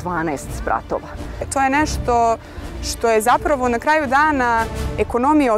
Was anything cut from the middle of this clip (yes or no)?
yes